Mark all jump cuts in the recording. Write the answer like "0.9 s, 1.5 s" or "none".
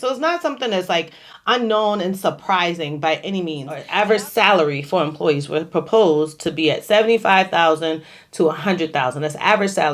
3.8 s